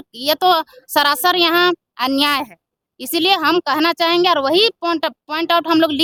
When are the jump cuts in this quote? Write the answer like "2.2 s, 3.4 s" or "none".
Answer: none